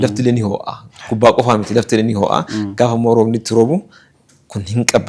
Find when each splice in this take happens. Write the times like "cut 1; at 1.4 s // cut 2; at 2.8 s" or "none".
none